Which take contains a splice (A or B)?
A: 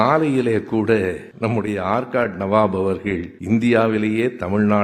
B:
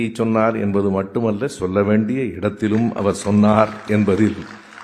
A